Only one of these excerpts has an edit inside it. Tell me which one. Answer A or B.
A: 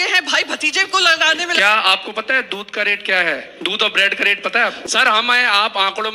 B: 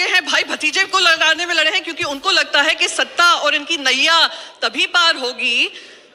A